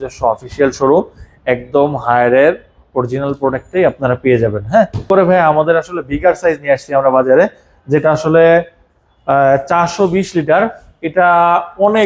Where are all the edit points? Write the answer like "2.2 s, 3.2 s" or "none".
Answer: 5.1 s